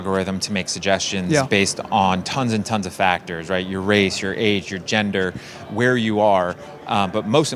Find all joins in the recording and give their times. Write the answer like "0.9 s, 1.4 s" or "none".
none